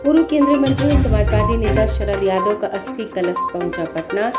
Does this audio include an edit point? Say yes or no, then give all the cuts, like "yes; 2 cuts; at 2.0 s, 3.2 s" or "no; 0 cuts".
no; 0 cuts